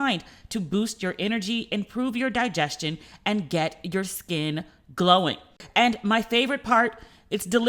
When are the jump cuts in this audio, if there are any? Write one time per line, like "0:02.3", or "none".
0:05.6